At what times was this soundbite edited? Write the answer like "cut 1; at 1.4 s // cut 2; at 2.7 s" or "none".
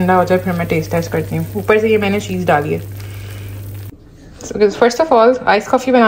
cut 1; at 3.8 s

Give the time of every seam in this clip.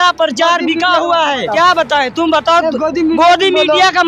cut 1; at 1.5 s

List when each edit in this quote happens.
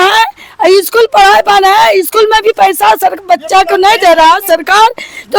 none

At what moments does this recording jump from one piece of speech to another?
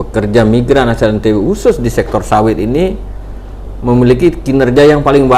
none

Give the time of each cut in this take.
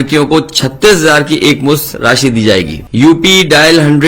cut 1; at 2.8 s

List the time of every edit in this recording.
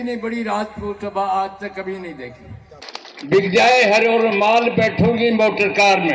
cut 1; at 2.9 s

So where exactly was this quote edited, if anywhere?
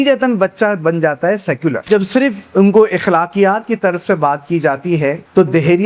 cut 1; at 1.9 s

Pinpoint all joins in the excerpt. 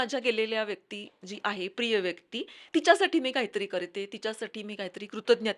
none

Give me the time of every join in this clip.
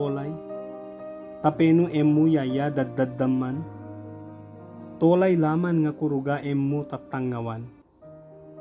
none

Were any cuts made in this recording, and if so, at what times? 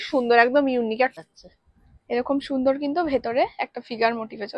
cut 1; at 1.1 s

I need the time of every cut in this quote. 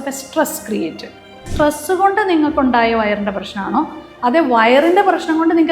cut 1; at 1.4 s

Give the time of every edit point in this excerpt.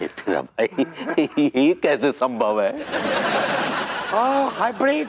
none

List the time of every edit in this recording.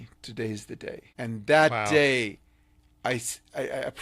cut 1; at 1.0 s

